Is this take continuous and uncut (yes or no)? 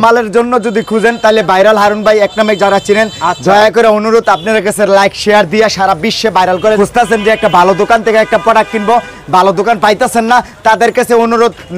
no